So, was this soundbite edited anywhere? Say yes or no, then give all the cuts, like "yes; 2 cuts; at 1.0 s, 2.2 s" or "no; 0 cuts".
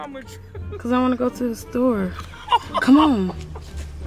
no; 0 cuts